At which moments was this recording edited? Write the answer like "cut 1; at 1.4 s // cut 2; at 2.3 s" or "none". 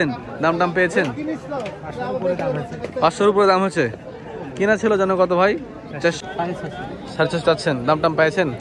cut 1; at 6.2 s